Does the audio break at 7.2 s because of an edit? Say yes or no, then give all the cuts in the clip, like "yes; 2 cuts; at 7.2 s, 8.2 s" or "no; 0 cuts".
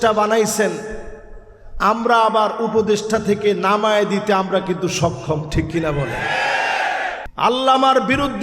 yes; 1 cut; at 7.2 s